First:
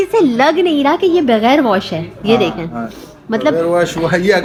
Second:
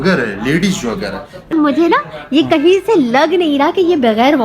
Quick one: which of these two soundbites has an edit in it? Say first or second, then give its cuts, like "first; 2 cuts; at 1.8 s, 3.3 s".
second; 1 cut; at 1.5 s